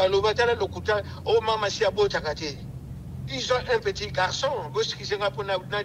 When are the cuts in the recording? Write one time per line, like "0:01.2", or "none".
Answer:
none